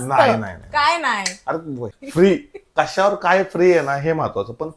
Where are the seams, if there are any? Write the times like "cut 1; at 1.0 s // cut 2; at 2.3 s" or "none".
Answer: cut 1; at 1.8 s